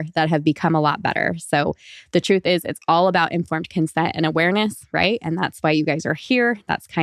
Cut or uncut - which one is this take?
uncut